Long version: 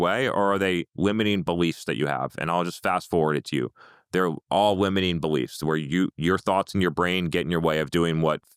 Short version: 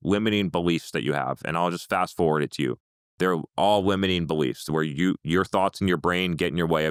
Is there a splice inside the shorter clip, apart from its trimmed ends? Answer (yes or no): no